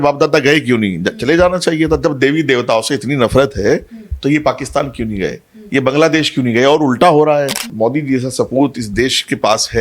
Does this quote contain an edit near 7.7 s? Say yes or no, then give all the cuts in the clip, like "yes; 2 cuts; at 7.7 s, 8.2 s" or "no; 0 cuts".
yes; 1 cut; at 7.7 s